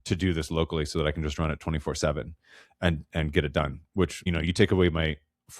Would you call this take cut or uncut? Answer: uncut